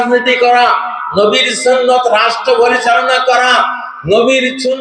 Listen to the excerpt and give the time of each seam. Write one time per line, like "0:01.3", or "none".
none